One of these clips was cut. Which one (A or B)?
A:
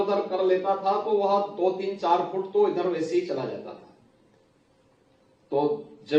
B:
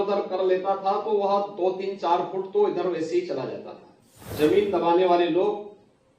B